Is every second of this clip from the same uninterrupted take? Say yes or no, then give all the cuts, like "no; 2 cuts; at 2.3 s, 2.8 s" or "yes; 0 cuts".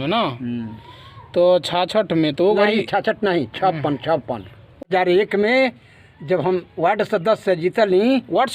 no; 1 cut; at 4.9 s